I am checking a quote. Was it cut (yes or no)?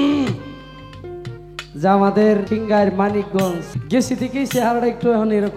yes